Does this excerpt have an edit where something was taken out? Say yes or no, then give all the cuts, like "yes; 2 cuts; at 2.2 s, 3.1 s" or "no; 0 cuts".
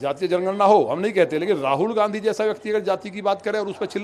no; 0 cuts